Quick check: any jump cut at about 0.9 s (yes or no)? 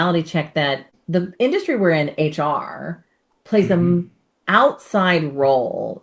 yes